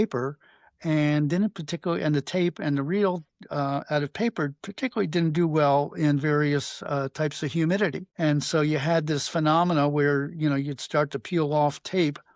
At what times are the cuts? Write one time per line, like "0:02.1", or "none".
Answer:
0:08.0